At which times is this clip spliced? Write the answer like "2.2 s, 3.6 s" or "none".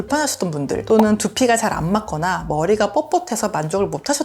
none